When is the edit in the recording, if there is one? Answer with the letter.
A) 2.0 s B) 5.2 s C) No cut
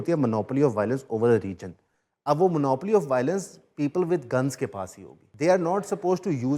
B